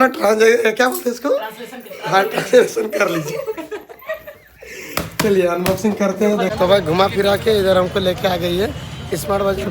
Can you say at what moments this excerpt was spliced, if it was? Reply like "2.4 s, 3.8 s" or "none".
6.5 s